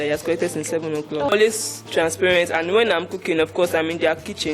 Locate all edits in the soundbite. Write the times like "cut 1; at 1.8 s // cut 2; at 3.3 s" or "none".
cut 1; at 1.3 s